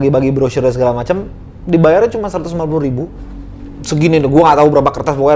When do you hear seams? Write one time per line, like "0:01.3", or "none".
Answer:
none